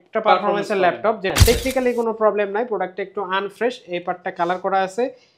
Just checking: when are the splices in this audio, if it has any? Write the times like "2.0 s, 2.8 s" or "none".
1.3 s